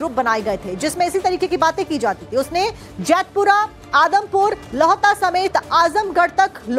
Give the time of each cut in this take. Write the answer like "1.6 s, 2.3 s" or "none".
none